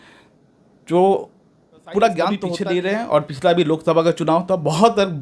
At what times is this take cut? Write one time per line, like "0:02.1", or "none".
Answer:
0:02.5